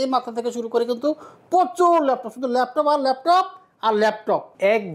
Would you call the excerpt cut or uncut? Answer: uncut